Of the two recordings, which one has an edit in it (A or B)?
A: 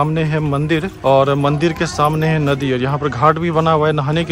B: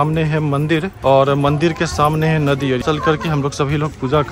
B